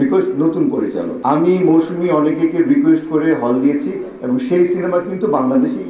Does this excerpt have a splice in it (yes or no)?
yes